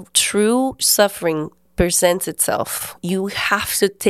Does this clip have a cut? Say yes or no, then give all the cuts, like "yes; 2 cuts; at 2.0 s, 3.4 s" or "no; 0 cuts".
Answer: yes; 1 cut; at 2.9 s